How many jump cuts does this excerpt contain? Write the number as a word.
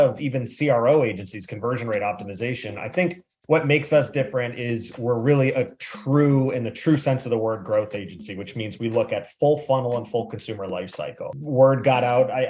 one